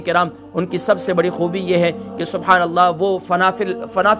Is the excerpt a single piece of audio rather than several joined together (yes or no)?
yes